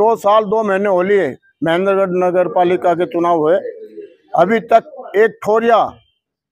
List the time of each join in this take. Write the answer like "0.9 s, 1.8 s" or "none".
none